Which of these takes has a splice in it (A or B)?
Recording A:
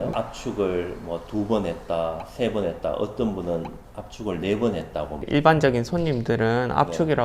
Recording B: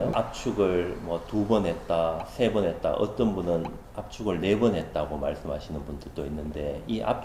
A